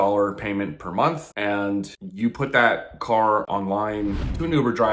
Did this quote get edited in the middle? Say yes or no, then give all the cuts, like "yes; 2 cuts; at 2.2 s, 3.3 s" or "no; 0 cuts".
no; 0 cuts